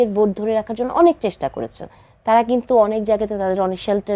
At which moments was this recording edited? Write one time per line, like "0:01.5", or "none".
none